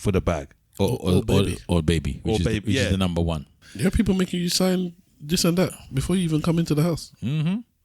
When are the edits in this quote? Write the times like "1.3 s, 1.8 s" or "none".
3.6 s